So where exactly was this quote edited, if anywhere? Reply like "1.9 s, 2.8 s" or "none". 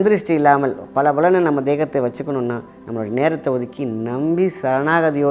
2.8 s